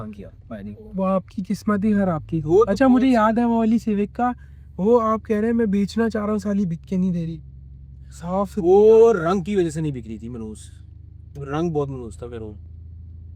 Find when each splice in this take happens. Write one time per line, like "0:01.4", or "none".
none